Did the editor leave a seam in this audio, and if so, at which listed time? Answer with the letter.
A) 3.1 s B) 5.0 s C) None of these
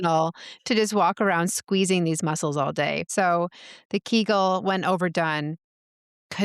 A